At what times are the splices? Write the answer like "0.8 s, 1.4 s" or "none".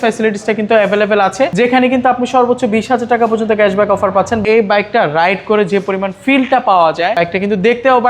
4.4 s, 7.2 s